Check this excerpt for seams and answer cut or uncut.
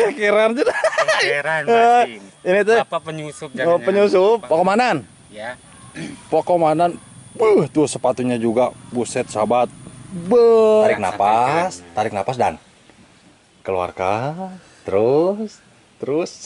cut